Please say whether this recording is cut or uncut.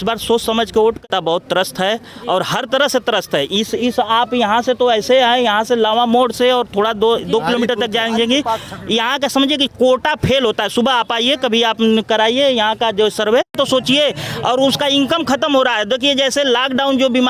cut